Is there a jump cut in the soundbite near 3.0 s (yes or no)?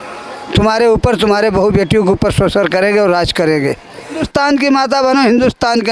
no